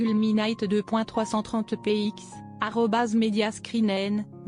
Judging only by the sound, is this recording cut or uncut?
uncut